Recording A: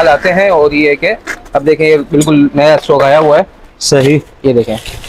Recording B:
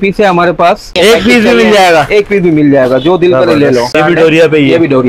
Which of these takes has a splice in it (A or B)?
B